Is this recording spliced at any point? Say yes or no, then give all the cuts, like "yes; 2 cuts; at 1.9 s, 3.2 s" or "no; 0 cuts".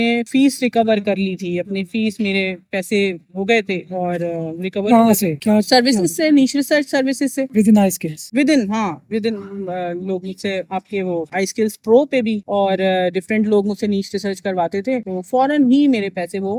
no; 0 cuts